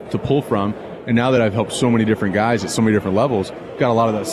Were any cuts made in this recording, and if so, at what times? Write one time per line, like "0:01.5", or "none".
none